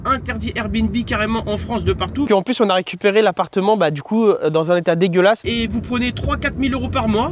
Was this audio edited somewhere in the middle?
yes; 2 cuts; at 2.3 s, 5.5 s

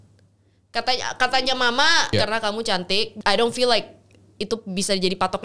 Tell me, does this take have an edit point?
yes; 2 cuts; at 2.1 s, 3.1 s

